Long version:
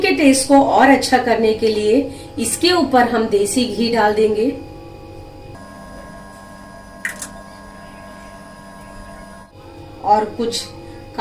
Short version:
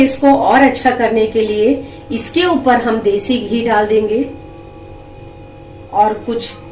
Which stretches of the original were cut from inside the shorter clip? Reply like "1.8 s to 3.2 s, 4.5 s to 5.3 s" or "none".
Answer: 5.6 s to 9.4 s

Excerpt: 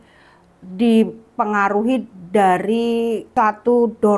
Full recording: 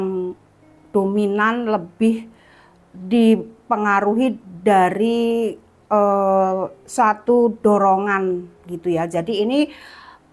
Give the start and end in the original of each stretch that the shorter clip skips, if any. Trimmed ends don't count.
5.5 s to 6.8 s

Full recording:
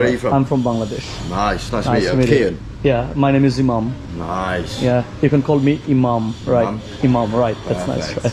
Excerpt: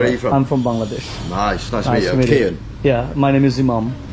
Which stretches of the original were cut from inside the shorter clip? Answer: none

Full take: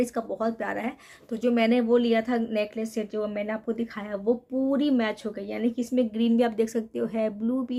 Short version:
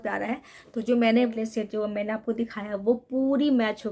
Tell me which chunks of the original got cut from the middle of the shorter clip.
1.9 s to 2.7 s

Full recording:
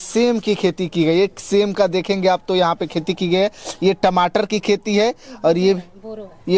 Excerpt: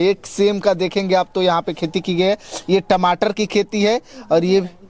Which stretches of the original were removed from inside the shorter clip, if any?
none

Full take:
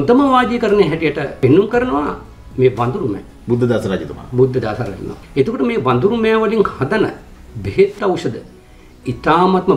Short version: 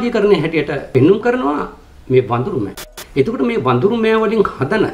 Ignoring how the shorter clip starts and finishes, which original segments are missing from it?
3.3 s to 5.0 s

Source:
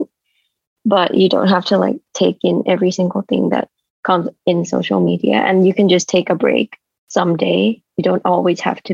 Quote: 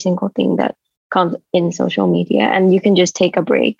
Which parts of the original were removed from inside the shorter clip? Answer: none

